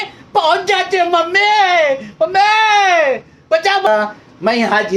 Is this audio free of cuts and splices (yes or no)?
no